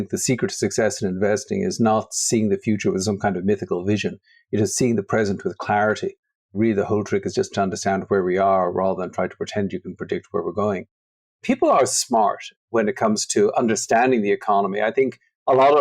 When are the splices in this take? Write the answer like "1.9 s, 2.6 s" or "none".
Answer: 11.1 s